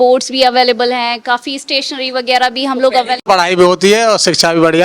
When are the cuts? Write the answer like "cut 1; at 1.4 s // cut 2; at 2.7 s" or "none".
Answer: cut 1; at 3.2 s